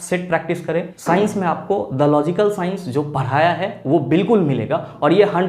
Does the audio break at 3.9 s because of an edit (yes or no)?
no